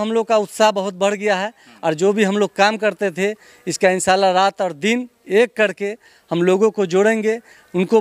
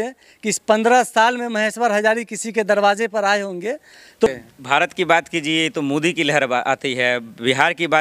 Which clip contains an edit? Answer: second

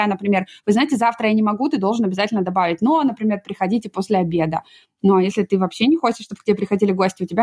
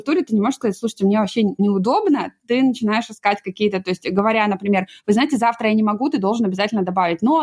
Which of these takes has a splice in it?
second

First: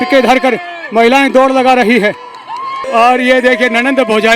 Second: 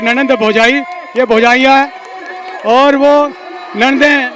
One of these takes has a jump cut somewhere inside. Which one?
first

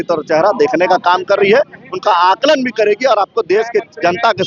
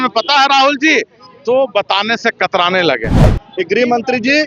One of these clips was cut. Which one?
second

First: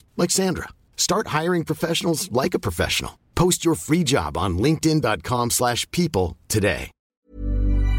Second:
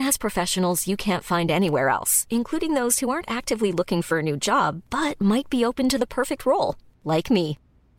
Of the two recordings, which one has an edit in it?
first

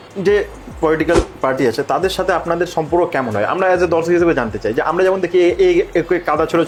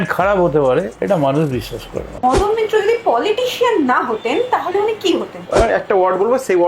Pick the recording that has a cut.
second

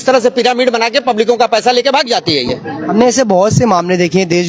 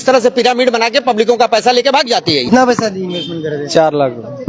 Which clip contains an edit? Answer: second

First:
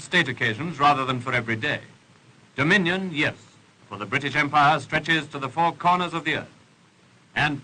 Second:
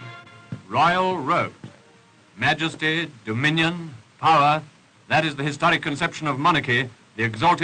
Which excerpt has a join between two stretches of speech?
second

